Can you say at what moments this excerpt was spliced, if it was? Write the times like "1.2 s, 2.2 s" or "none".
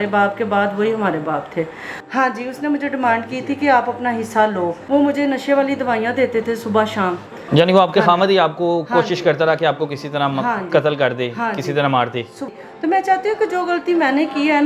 2.0 s, 4.8 s, 7.4 s, 12.4 s